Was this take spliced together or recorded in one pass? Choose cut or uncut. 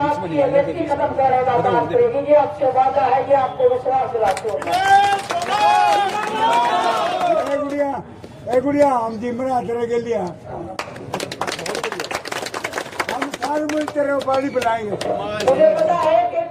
uncut